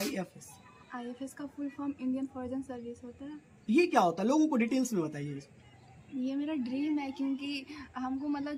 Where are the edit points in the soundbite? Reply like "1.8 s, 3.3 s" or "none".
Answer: none